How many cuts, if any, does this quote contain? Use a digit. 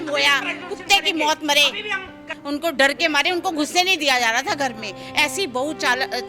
1